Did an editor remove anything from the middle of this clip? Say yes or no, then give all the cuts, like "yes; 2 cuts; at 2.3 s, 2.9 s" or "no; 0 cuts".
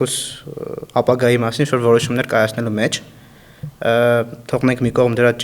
no; 0 cuts